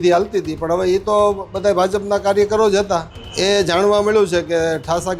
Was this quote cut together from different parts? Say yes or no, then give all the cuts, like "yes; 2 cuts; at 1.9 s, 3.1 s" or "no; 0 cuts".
yes; 1 cut; at 3.2 s